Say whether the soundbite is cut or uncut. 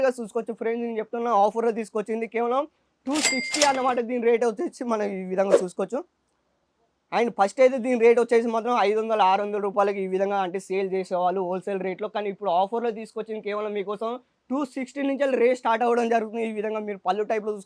uncut